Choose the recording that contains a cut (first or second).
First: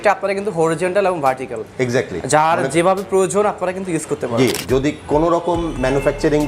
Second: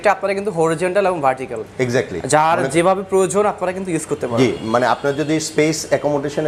first